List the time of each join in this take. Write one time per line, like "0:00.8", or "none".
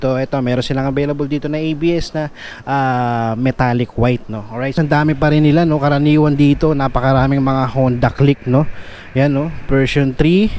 0:04.8